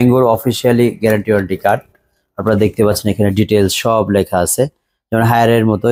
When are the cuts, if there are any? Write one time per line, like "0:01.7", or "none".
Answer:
none